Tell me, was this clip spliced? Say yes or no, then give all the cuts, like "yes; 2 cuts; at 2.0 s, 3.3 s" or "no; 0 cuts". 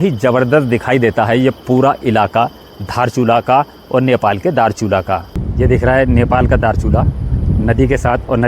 yes; 1 cut; at 5.4 s